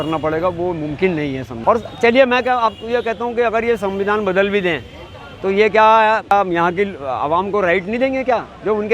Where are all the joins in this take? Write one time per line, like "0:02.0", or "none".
0:01.5
0:06.3